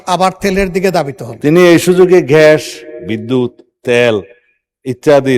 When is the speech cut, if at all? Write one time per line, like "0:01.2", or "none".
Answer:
0:01.2